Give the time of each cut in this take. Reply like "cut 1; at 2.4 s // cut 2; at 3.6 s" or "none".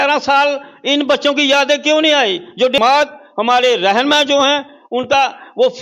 cut 1; at 2.8 s